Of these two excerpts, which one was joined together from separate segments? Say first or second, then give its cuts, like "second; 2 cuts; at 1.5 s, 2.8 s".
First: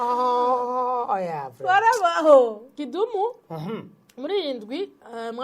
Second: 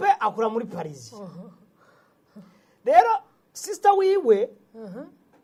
first; 1 cut; at 2.7 s